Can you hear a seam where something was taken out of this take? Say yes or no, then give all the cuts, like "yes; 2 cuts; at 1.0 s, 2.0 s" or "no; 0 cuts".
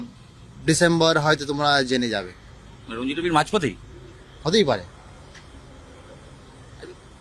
no; 0 cuts